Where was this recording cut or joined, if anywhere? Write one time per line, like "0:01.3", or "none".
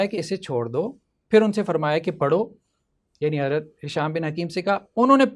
none